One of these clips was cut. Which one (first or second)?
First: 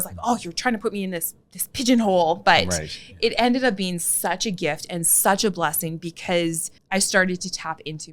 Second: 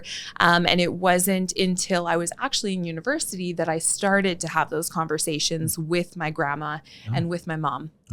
first